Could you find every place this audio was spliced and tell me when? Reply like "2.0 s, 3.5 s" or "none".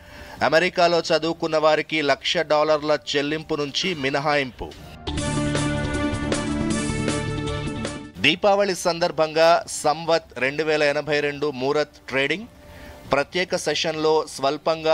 none

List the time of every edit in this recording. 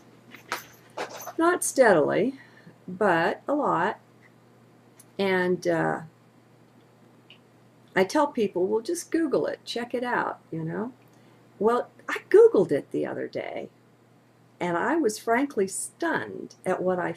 15.3 s

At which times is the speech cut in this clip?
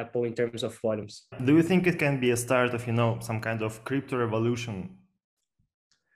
1.3 s

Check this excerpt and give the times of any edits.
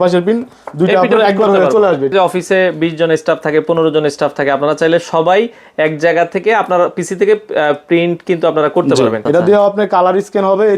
2.1 s, 9.2 s

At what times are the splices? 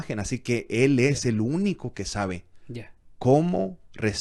none

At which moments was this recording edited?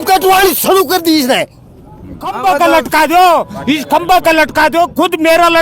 2.4 s

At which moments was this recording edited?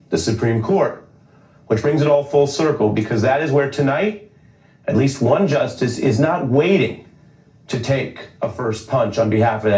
8.6 s

